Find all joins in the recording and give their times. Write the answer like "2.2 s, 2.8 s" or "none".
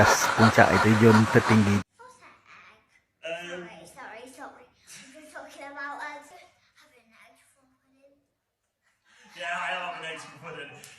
1.8 s